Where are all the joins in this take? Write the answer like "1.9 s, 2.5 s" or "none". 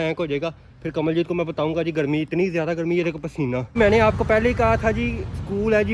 3.7 s